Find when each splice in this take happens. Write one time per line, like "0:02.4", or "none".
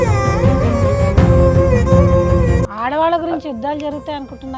0:02.6